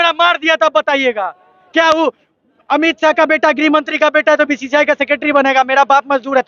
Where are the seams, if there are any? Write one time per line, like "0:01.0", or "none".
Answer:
none